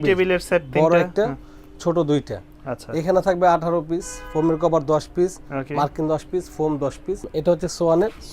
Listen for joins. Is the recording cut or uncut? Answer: cut